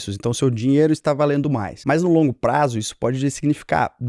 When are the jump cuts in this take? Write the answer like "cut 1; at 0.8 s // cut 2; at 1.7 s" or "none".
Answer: none